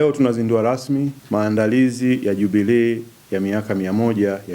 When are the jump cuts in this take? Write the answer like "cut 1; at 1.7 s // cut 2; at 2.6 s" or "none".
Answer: cut 1; at 1.2 s